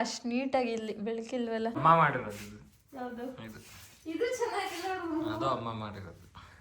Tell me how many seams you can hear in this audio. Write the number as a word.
one